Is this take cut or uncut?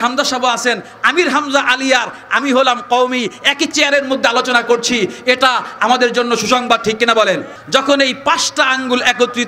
cut